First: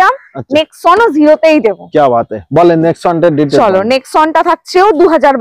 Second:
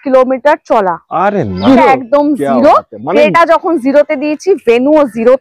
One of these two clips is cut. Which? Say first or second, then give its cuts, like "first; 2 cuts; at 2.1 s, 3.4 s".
second; 1 cut; at 1.7 s